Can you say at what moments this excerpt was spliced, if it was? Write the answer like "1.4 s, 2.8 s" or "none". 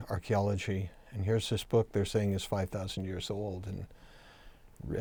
none

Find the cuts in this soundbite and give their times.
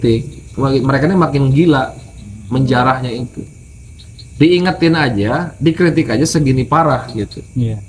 none

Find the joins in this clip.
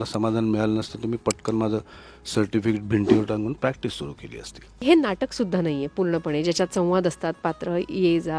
4.8 s

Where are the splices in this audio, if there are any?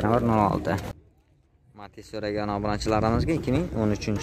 1.0 s

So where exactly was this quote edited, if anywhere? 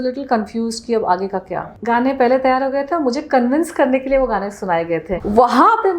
1.7 s, 5.1 s

